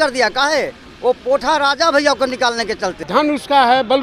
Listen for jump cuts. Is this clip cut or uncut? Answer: cut